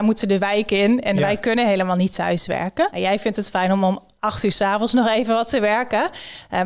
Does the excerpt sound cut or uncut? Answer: cut